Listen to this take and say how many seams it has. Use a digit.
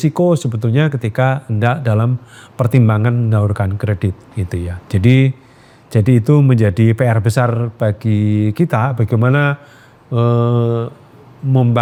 0